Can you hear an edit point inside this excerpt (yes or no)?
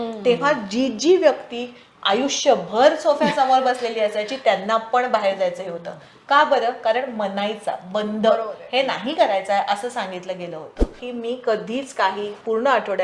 yes